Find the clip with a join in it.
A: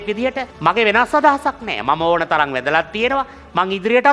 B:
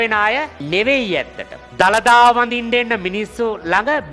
B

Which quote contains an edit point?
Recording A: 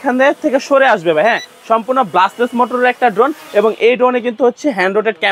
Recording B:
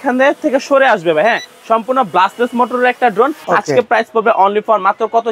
B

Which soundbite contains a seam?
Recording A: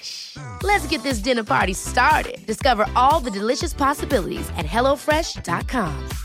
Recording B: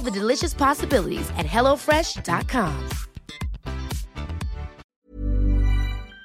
B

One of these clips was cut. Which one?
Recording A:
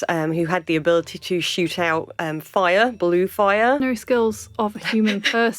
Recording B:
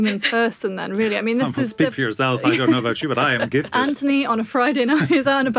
A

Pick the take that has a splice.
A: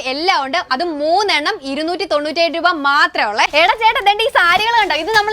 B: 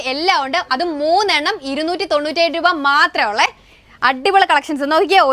A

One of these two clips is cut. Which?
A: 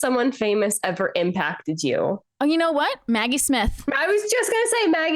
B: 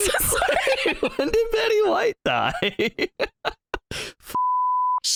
A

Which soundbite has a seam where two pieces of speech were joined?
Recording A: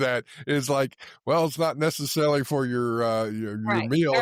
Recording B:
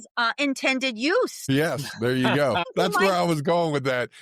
B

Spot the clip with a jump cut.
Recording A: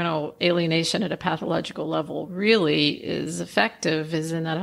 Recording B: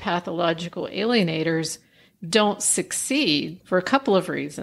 B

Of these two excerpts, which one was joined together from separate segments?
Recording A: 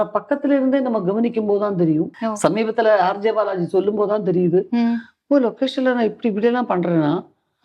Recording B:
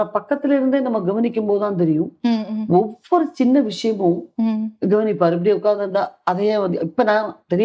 A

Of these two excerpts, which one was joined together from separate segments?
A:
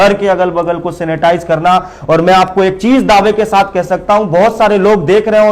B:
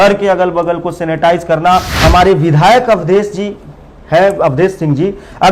B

